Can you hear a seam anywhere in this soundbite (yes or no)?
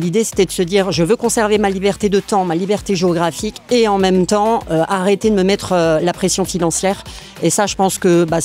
no